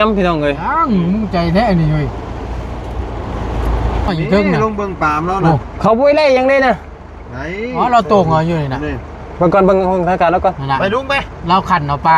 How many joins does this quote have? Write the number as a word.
one